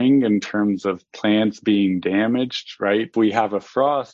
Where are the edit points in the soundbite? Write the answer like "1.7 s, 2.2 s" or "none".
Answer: 3.1 s